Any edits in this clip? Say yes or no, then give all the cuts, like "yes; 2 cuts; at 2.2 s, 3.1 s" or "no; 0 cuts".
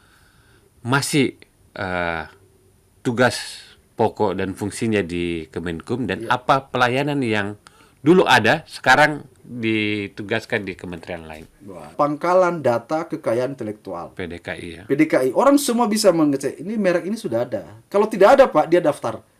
yes; 1 cut; at 11.9 s